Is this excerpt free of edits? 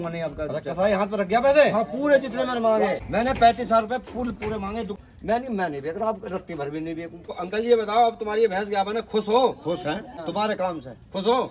no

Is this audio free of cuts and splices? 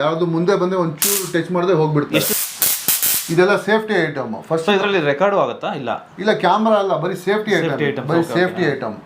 no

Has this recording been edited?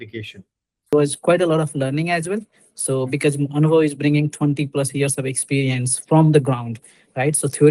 yes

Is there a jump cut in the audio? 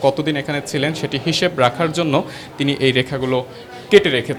no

